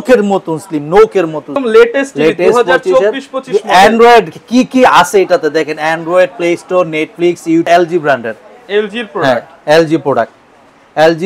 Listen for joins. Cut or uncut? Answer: cut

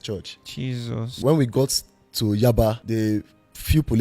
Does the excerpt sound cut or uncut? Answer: cut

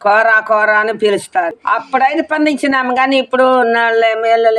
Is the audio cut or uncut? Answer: cut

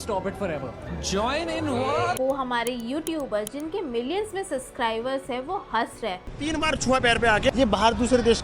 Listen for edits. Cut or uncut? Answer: cut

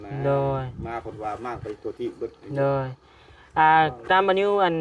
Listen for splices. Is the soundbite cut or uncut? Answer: uncut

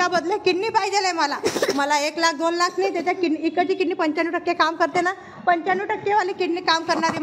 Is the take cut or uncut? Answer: uncut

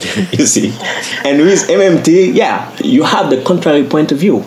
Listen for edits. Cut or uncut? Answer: cut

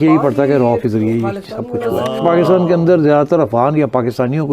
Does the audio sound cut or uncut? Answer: cut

